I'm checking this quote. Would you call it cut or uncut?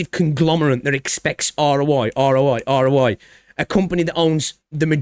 uncut